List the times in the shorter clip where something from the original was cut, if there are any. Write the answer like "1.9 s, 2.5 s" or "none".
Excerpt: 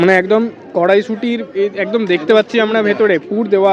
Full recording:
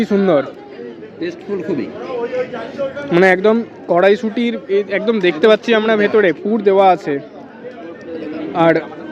none